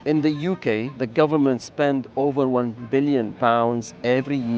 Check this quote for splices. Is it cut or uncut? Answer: cut